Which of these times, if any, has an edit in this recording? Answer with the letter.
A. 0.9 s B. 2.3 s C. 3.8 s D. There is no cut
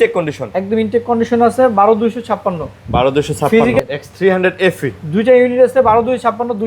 C